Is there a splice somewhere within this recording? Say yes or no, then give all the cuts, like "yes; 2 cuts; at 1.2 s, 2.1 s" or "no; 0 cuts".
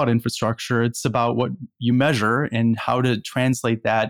no; 0 cuts